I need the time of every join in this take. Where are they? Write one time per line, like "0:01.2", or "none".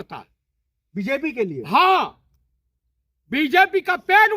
none